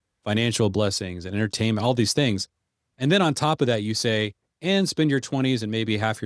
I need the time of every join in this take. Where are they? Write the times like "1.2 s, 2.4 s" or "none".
none